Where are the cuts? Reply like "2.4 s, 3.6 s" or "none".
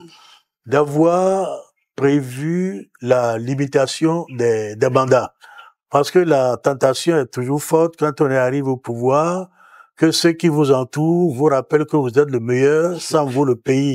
none